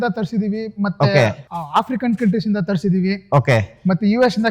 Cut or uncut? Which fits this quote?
cut